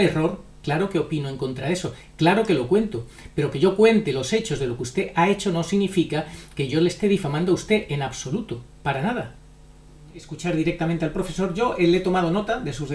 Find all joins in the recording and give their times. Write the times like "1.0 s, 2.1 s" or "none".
10.3 s

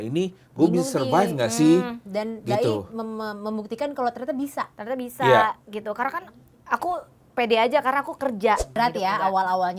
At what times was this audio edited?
8.7 s

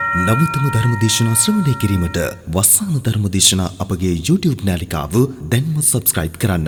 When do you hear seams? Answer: none

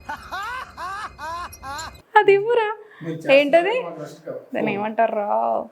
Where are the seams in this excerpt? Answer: 1.9 s

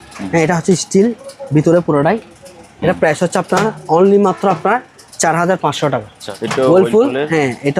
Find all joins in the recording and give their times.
6.2 s

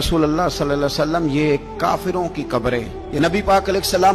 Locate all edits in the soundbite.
3.0 s

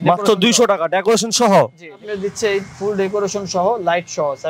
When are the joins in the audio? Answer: 2.0 s

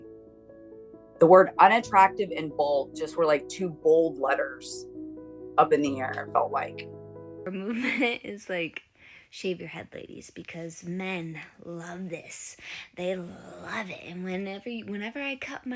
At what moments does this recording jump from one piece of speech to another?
7.5 s

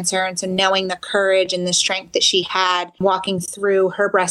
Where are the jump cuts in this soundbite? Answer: 3.0 s

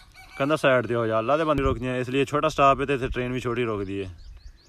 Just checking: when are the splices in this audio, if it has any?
1.6 s

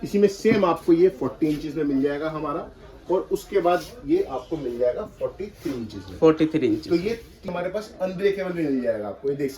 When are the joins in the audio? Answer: 7.5 s

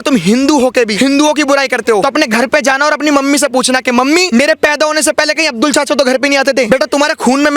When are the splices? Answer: 0.9 s, 2.0 s, 4.3 s, 6.7 s

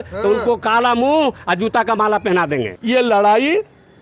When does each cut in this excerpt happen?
2.7 s

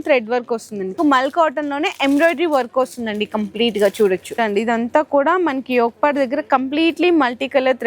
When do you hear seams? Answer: 0.9 s, 4.3 s

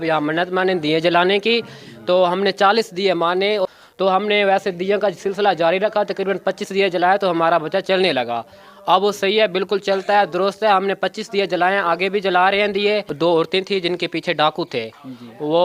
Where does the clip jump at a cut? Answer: 3.6 s, 13.1 s

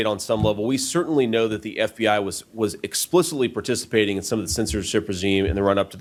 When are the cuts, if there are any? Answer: none

